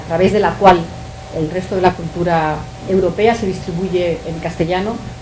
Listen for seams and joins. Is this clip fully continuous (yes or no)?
no